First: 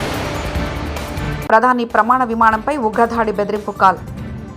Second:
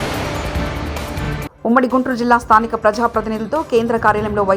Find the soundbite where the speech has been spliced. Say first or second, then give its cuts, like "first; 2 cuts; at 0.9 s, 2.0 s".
first; 1 cut; at 1.4 s